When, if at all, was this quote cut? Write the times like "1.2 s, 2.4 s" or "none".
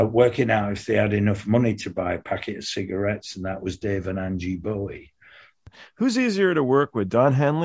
5.7 s